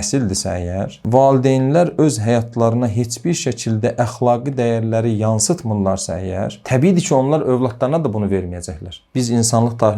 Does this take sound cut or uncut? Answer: cut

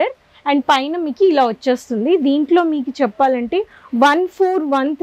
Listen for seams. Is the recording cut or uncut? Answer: uncut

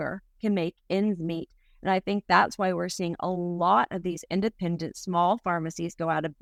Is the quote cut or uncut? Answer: uncut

